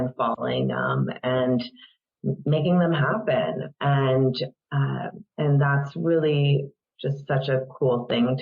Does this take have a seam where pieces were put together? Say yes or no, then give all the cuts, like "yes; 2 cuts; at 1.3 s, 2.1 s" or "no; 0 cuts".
yes; 1 cut; at 5.2 s